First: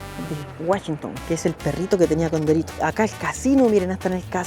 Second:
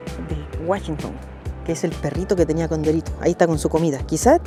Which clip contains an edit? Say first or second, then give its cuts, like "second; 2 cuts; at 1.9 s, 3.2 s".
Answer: first; 2 cuts; at 1.1 s, 2.7 s